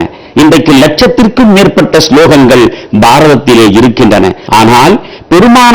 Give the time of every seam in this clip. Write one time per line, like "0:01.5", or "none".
0:04.4

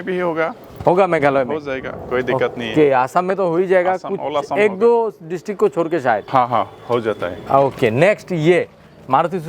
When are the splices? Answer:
none

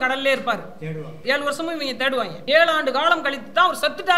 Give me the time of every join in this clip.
0:01.1
0:02.4

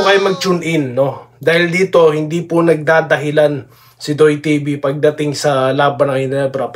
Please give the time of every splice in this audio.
none

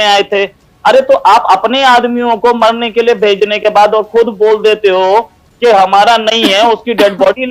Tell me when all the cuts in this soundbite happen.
none

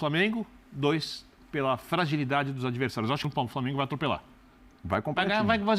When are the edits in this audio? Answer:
0:03.2

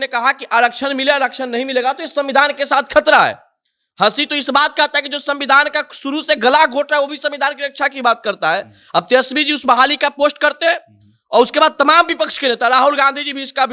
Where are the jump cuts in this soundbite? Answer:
none

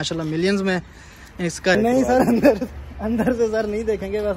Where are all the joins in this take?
0:01.8

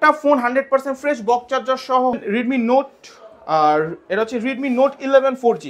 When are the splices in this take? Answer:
0:02.2

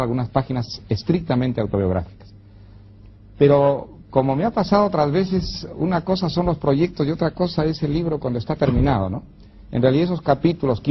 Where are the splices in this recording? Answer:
0:05.7

